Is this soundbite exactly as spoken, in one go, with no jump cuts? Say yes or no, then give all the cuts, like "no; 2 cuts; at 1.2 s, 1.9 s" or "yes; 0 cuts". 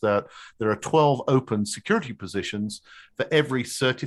yes; 0 cuts